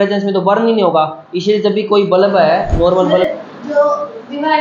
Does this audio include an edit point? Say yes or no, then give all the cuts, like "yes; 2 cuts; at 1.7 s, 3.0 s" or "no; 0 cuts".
yes; 1 cut; at 3.3 s